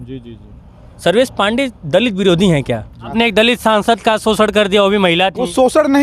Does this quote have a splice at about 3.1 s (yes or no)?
yes